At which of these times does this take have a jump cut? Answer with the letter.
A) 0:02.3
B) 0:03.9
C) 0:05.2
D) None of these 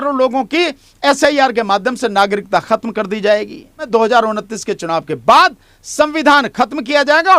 B